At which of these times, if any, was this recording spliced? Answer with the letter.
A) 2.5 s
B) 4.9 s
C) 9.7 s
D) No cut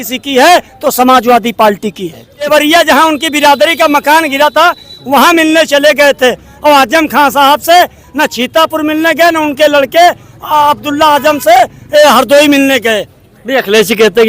A